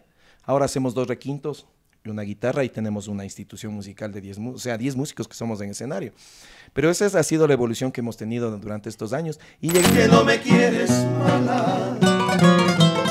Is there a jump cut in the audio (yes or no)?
yes